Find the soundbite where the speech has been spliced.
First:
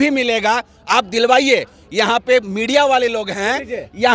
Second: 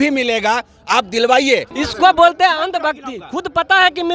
second; 1 cut; at 1.7 s

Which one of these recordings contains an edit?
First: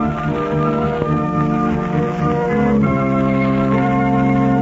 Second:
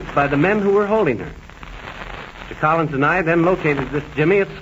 second; 1 cut; at 3.4 s

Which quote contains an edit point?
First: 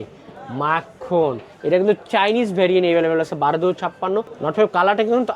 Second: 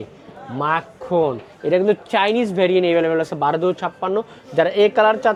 first; 1 cut; at 4.3 s

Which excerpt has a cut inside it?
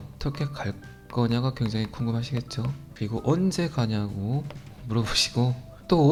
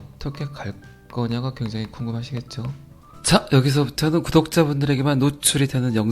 second; 1 cut; at 3.1 s

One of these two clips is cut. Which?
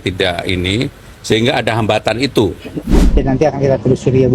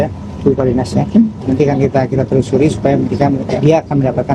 first; 1 cut; at 3.1 s

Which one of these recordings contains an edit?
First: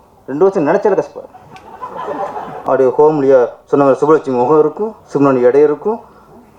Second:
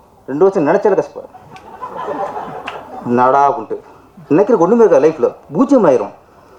first; 1 cut; at 2.5 s

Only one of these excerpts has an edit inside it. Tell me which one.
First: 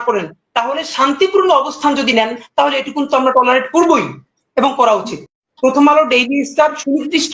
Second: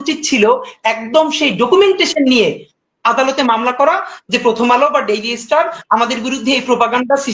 first; 1 cut; at 5.4 s

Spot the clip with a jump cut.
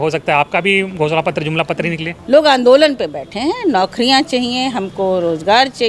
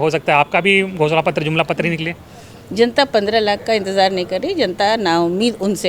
first; 1 cut; at 2.1 s

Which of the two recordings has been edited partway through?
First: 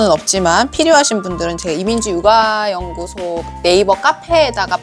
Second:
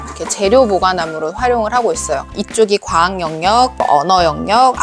second; 2 cuts; at 2.4 s, 3.8 s

